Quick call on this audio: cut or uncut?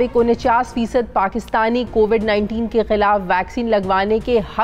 uncut